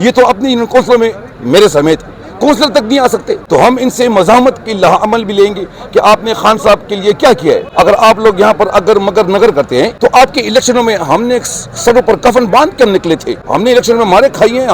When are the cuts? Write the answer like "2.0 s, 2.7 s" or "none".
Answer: 3.4 s, 7.7 s, 9.9 s, 13.4 s